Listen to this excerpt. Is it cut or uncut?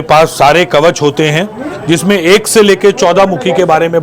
uncut